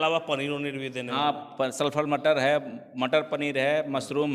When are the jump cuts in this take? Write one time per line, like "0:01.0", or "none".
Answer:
none